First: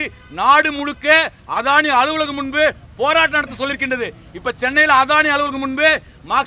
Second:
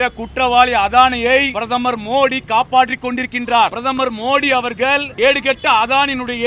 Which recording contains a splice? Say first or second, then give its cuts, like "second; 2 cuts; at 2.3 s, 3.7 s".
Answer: second; 3 cuts; at 1.6 s, 3.8 s, 5.1 s